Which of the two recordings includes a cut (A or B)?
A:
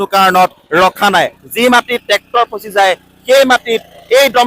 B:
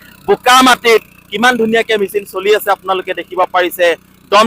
A